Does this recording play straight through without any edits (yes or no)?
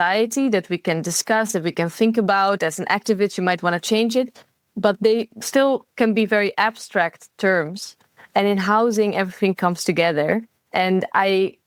yes